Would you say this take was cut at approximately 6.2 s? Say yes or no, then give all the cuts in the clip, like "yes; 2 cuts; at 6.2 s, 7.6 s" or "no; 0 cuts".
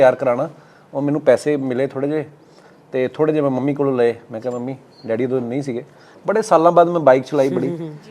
yes; 1 cut; at 6.2 s